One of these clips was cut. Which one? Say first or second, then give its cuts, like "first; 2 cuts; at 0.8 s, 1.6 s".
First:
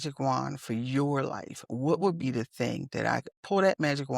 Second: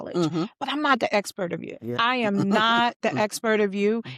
second; 1 cut; at 1.7 s